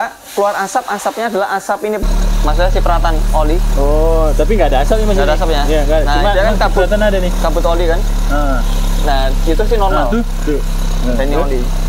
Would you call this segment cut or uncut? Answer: cut